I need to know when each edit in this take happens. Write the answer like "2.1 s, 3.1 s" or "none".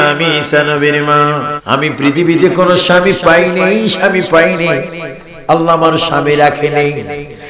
1.5 s